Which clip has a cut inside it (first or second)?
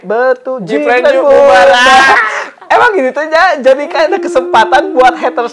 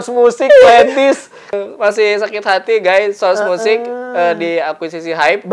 second